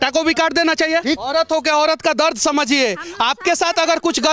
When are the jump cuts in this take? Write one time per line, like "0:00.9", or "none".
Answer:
0:01.3